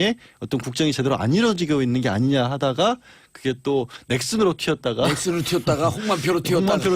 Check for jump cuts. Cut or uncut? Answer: cut